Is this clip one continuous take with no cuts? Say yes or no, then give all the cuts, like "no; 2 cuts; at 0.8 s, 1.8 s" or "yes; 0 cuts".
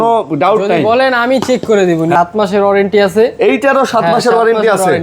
no; 1 cut; at 2.1 s